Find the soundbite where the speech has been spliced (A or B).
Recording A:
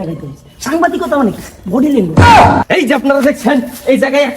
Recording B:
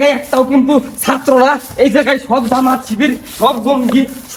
A